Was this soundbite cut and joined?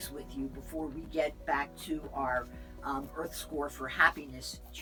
no; 0 cuts

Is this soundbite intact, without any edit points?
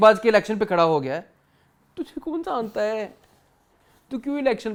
yes; 0 cuts

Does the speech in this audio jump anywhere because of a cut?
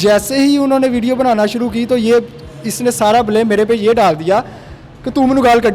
no; 0 cuts

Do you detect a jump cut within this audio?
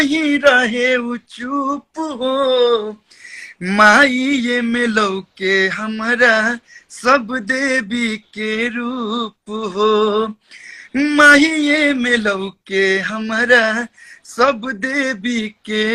no; 0 cuts

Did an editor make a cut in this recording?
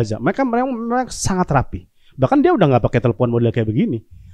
no; 0 cuts

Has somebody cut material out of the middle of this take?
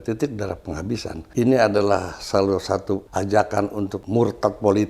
yes; 3 cuts; at 1.2 s, 3.1 s, 4.0 s

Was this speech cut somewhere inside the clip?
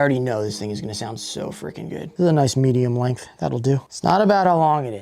yes; 2 cuts; at 2.1 s, 3.9 s

